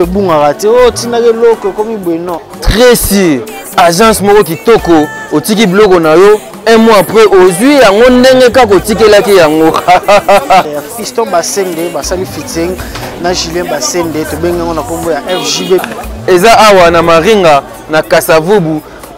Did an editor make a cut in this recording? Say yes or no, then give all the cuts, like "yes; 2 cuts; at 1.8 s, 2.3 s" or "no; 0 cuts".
yes; 1 cut; at 2.4 s